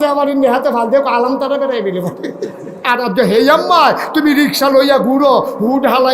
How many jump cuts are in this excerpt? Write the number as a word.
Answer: one